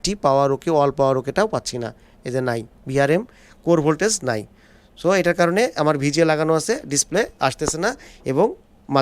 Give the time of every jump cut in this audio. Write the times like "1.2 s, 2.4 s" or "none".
none